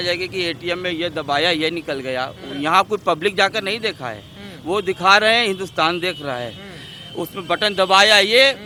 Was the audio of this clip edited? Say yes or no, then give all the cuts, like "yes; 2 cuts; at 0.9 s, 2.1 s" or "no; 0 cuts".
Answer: no; 0 cuts